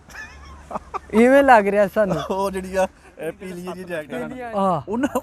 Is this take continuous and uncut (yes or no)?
no